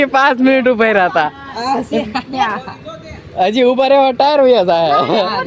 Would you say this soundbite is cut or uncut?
uncut